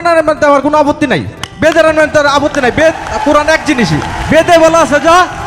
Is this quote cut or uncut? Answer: uncut